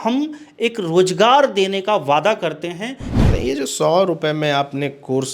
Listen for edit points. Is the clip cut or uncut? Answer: cut